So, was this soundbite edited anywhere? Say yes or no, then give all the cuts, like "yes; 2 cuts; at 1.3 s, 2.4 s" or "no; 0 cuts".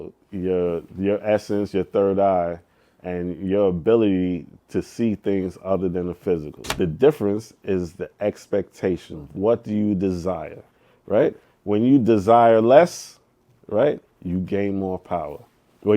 yes; 1 cut; at 6.6 s